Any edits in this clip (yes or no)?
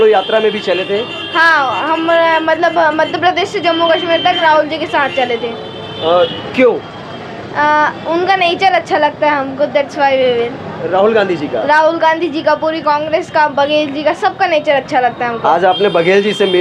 no